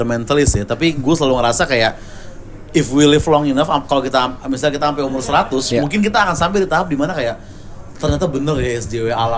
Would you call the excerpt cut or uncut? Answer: uncut